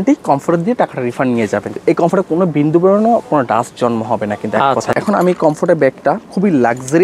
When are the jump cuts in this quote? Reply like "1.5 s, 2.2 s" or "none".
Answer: 1.7 s, 4.9 s